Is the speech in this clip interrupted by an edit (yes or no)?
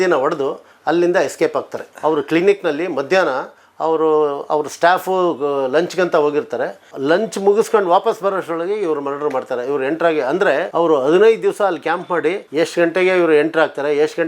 yes